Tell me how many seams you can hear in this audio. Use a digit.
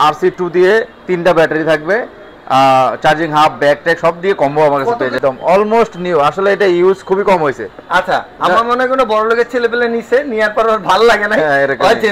1